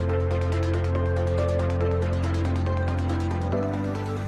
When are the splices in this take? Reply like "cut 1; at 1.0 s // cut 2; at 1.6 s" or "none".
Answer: cut 1; at 1.5 s